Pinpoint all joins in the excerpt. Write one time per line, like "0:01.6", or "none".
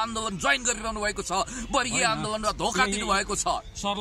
none